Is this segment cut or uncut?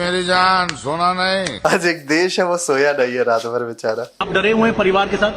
cut